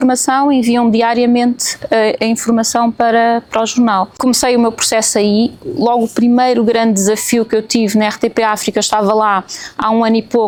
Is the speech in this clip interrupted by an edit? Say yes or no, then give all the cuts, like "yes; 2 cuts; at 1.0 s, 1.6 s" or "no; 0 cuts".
no; 0 cuts